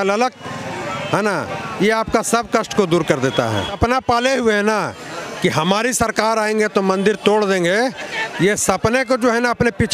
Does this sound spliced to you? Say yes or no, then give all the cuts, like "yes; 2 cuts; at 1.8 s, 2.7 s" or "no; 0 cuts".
yes; 1 cut; at 3.8 s